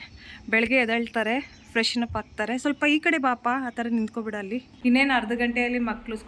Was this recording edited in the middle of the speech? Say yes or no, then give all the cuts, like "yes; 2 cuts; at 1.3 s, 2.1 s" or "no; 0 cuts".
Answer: yes; 1 cut; at 4.7 s